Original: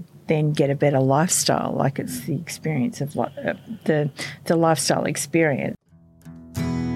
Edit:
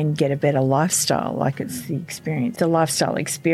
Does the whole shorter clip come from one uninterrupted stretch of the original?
no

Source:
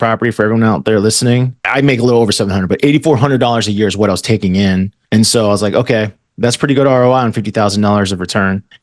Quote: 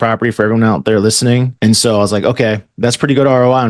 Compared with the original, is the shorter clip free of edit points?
no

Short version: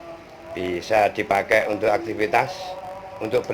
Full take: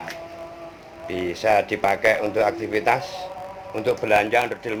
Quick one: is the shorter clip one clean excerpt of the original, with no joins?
yes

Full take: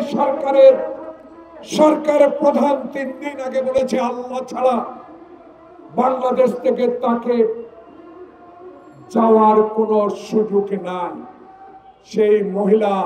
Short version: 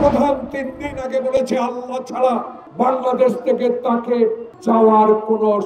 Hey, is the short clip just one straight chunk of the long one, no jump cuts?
no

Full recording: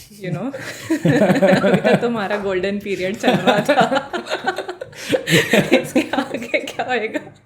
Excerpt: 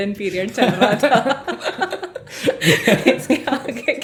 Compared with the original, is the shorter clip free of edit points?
yes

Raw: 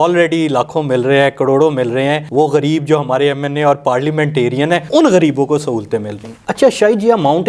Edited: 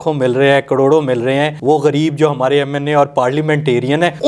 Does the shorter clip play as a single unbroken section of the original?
yes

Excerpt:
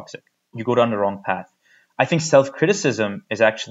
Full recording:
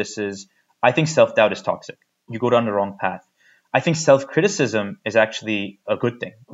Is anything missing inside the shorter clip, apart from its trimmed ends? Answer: no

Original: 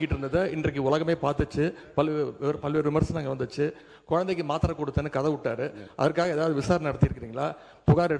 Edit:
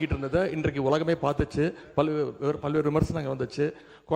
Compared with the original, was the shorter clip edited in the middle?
no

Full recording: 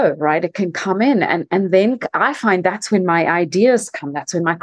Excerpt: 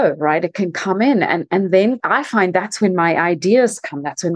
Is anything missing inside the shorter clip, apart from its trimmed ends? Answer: yes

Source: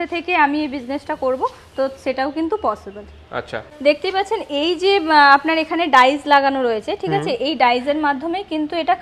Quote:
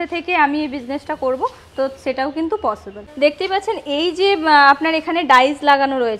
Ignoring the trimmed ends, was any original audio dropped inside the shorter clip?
yes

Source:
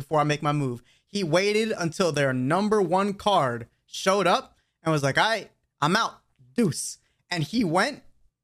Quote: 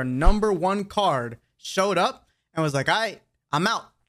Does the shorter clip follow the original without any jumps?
yes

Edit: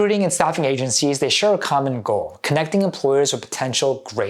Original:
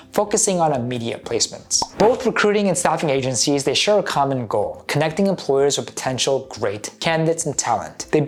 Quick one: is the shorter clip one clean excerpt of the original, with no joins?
yes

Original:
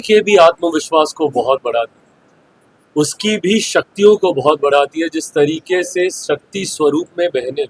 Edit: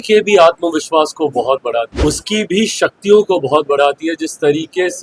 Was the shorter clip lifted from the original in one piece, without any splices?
no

